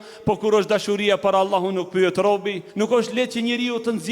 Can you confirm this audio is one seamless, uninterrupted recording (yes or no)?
no